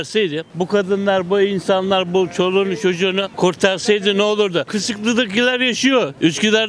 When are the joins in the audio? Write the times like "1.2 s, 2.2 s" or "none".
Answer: 4.7 s